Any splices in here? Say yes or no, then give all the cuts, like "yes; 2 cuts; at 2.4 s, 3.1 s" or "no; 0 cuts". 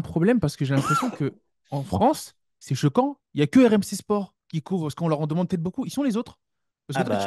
no; 0 cuts